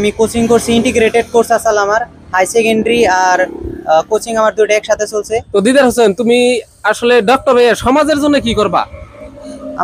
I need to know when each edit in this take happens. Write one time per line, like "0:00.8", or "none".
0:05.4